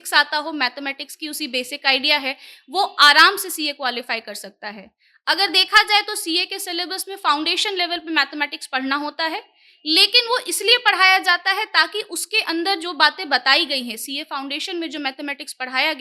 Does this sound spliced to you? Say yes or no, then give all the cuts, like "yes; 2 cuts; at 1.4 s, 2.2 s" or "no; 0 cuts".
no; 0 cuts